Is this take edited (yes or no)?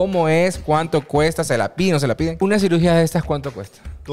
yes